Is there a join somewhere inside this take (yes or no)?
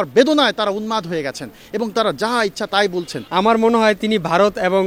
yes